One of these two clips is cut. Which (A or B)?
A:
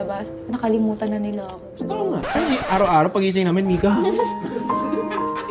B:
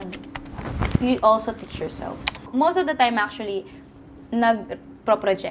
B